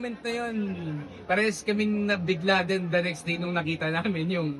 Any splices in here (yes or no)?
no